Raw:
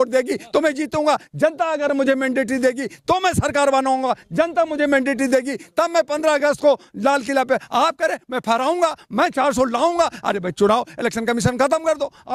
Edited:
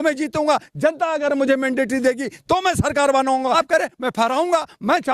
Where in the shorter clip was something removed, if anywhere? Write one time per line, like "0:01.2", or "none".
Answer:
0:03.6